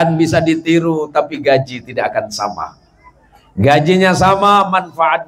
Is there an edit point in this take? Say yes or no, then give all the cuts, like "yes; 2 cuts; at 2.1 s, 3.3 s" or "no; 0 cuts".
no; 0 cuts